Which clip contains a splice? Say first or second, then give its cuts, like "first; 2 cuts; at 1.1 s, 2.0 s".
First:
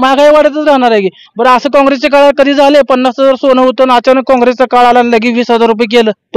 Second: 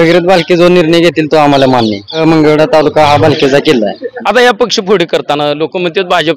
second; 2 cuts; at 2.2 s, 4.1 s